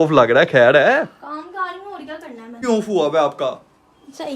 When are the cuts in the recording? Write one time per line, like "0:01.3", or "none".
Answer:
0:02.6